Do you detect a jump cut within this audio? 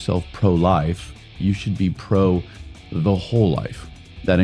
no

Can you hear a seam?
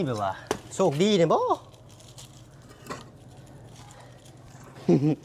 no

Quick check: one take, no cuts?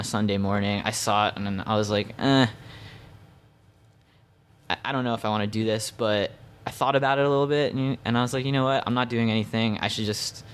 yes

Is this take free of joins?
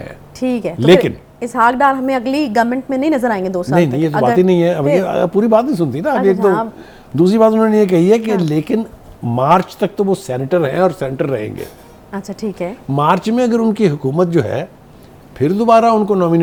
yes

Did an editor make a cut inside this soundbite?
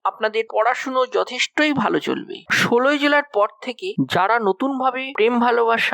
yes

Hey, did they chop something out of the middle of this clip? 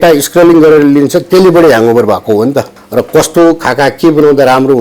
yes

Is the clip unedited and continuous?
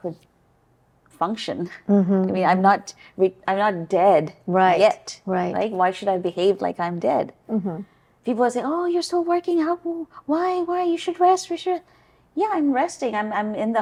yes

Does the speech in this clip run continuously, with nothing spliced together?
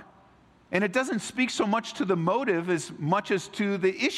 yes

